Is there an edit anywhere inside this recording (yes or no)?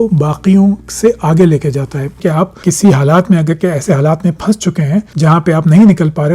yes